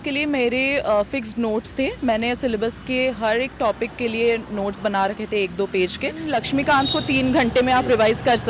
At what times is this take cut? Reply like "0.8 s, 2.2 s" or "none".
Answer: 6.2 s